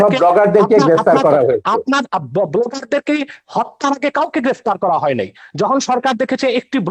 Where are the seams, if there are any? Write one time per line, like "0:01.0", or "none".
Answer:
none